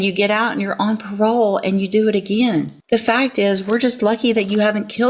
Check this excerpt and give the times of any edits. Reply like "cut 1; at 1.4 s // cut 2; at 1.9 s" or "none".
cut 1; at 2.8 s